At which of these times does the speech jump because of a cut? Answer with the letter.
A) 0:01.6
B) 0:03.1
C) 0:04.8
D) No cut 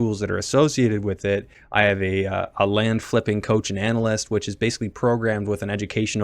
A